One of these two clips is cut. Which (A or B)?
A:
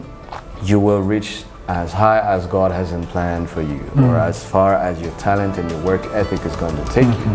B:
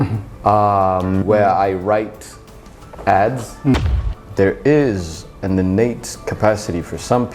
B